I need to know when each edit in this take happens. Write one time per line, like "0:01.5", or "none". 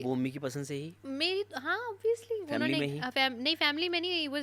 0:00.9